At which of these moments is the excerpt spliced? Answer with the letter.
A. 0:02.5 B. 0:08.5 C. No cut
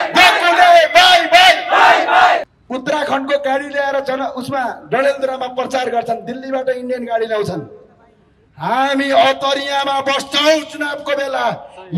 A